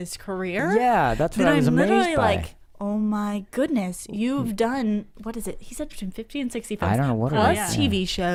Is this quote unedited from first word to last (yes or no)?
yes